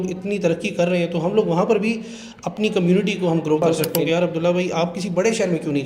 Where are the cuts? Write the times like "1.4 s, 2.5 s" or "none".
3.6 s